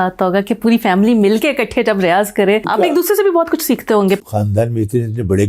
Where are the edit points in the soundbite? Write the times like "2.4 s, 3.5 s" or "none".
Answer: 2.7 s, 4.2 s